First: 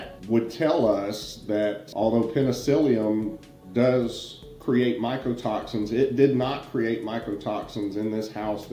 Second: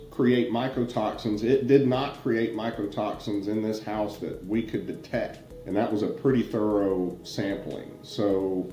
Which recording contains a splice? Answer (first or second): second